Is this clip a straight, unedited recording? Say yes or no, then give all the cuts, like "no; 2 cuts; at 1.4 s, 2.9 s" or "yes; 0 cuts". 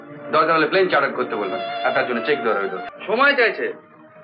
no; 1 cut; at 2.9 s